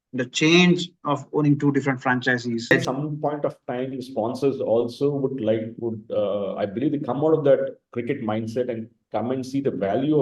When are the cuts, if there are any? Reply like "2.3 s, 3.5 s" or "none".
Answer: 2.7 s